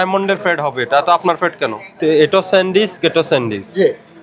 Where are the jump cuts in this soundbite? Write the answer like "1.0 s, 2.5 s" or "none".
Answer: 2.0 s